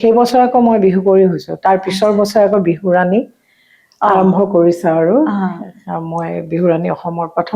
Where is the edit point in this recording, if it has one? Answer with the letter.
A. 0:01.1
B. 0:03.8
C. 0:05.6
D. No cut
D